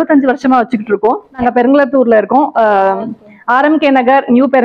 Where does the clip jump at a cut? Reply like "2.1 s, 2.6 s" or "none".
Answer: 1.4 s